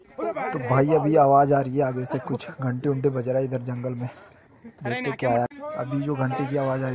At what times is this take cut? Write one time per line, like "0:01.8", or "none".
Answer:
0:05.5